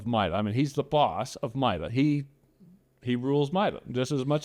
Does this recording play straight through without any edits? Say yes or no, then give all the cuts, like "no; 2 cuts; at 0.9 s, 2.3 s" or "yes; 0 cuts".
yes; 0 cuts